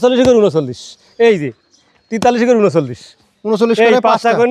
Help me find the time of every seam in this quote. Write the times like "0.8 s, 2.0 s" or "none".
none

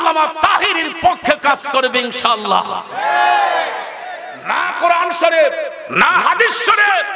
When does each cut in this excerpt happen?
4.4 s

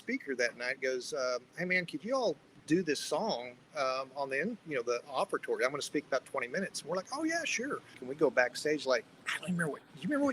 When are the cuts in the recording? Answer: 8.1 s

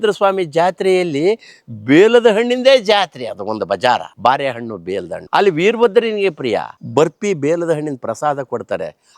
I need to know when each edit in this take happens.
5.2 s, 6.7 s

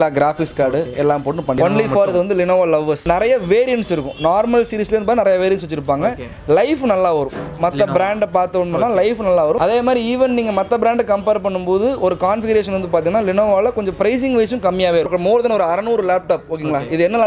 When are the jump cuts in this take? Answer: 1.6 s, 9.6 s, 15.1 s

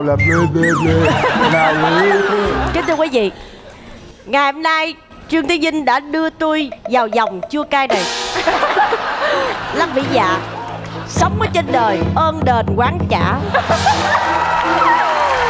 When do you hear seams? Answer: 2.6 s

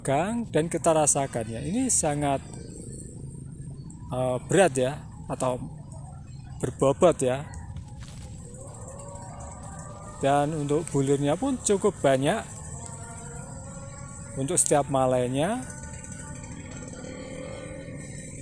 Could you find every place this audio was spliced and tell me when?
12.9 s

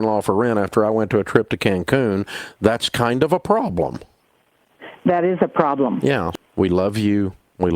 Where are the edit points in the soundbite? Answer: 6.2 s

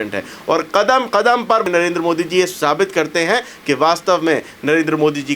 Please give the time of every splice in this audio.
1.6 s

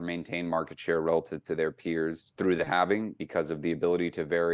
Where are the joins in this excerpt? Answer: 2.3 s, 3.2 s

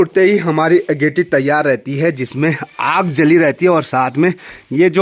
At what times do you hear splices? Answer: none

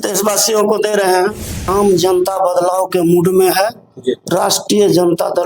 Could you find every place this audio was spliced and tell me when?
1.7 s

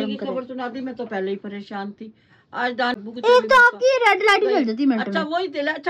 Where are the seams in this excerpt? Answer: 2.9 s

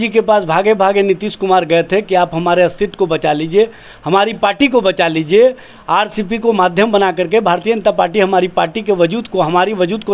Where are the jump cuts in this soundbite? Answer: none

